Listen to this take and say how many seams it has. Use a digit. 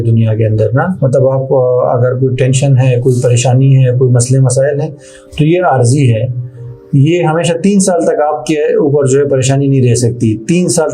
1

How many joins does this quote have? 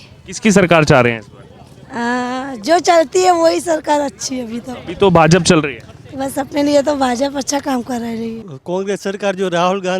1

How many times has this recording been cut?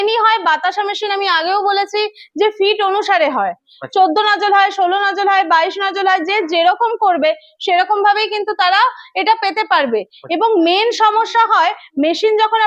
0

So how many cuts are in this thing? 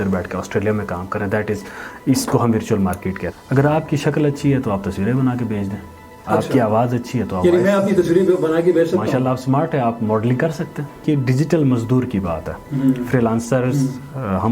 2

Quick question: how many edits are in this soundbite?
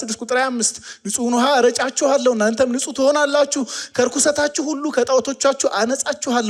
0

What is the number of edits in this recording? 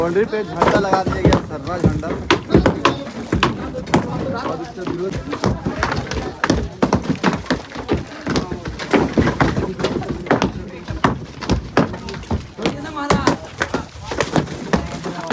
1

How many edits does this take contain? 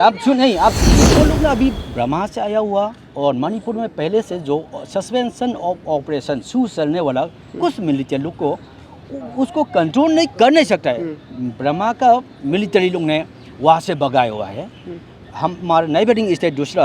1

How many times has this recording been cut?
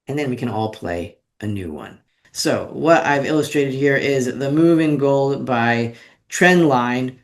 1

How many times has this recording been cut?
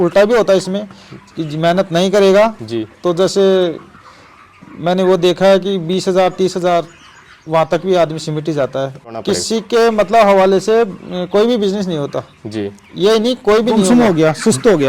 2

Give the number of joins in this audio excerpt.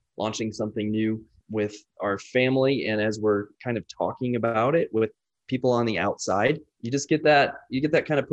2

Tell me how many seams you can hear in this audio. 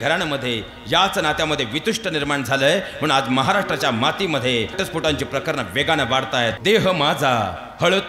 2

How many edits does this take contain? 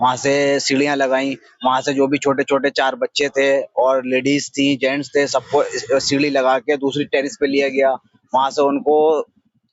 0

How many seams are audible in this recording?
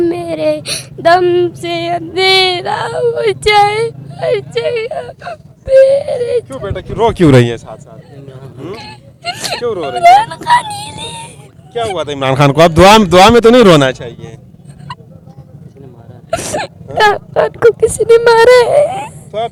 0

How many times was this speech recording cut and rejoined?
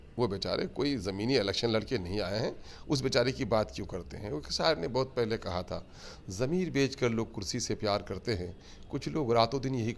0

